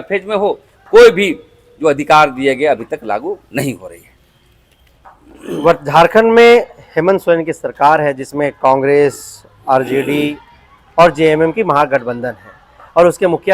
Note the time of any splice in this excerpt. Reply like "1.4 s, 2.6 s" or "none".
none